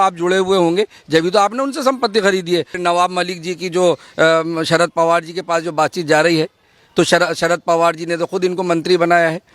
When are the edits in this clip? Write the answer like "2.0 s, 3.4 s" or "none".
2.8 s